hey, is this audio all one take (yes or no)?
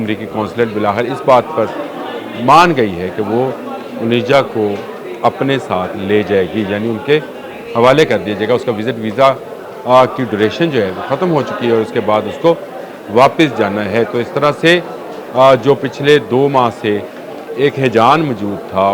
yes